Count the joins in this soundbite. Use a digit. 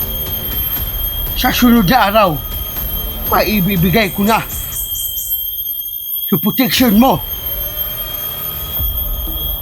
2